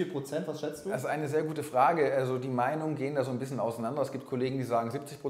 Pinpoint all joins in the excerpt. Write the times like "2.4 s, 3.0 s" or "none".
none